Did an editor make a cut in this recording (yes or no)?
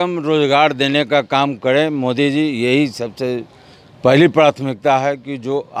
no